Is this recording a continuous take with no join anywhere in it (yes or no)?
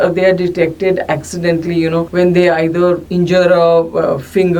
no